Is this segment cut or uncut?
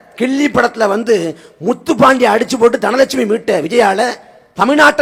uncut